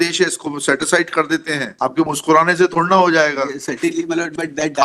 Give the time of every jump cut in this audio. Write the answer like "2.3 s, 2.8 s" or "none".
1.7 s